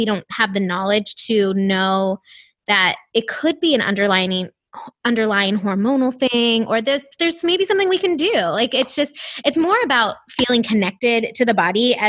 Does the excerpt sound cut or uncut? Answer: uncut